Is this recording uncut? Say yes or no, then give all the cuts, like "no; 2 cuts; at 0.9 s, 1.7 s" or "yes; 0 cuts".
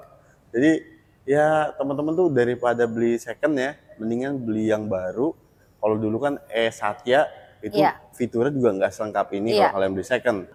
yes; 0 cuts